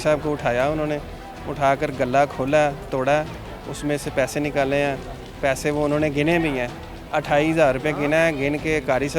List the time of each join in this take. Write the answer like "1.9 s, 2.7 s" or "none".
none